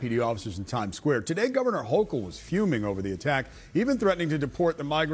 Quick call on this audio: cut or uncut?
uncut